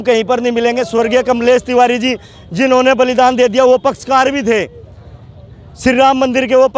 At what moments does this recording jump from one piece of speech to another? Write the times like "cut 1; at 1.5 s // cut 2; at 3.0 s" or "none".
none